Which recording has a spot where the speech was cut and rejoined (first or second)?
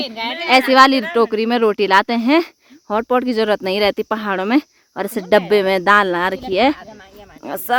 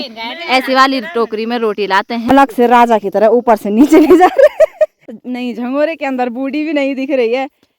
second